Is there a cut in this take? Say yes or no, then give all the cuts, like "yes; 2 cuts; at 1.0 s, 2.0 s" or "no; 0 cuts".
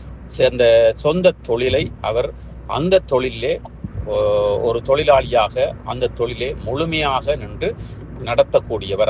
no; 0 cuts